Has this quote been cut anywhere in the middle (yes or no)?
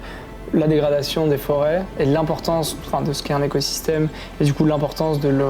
no